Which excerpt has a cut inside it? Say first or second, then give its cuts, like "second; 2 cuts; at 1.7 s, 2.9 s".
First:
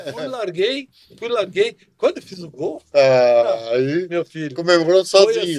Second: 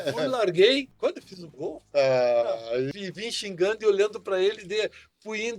second; 2 cuts; at 0.9 s, 2.9 s